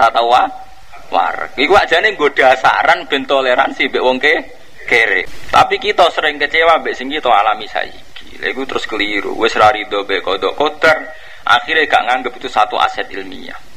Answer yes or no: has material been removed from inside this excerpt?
yes